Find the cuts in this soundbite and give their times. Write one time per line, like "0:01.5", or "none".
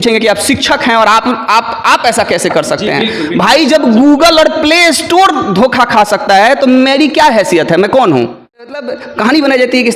0:08.7